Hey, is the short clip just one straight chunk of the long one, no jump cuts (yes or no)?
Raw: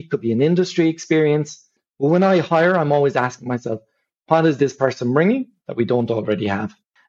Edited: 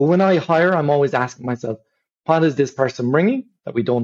yes